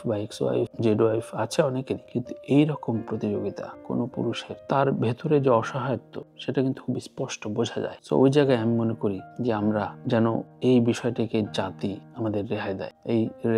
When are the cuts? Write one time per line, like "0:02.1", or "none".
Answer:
none